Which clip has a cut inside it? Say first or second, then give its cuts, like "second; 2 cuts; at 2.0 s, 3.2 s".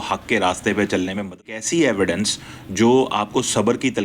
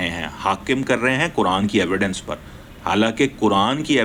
first; 1 cut; at 1.5 s